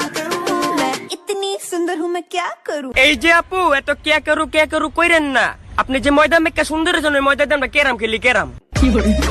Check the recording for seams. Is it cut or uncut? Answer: uncut